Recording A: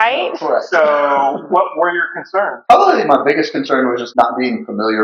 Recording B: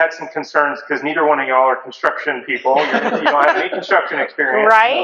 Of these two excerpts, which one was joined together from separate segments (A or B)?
A